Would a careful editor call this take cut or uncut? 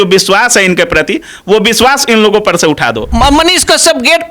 cut